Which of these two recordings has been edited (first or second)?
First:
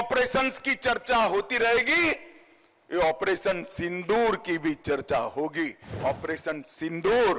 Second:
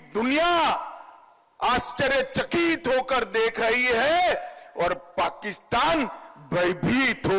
first